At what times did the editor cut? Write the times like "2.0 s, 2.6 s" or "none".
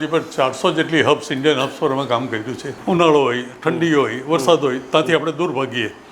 2.7 s